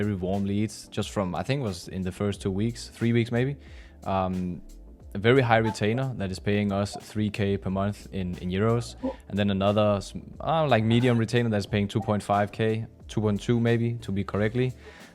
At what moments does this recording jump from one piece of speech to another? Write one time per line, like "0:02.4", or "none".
none